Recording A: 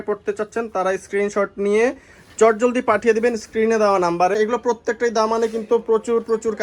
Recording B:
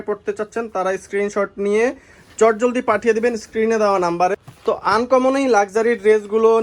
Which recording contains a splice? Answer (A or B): A